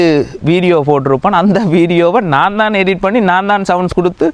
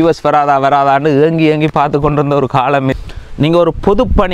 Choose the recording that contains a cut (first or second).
second